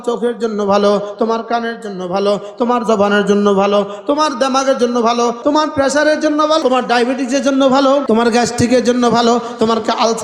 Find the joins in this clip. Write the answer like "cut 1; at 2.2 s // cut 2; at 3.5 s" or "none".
cut 1; at 5.4 s // cut 2; at 6.6 s // cut 3; at 8.0 s